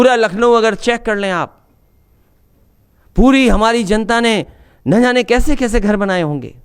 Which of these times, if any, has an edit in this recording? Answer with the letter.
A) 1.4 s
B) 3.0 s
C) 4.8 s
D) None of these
D